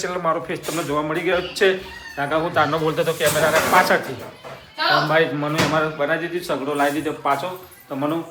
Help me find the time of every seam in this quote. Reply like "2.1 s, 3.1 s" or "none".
none